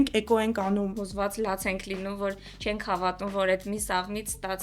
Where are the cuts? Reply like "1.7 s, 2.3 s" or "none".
0.9 s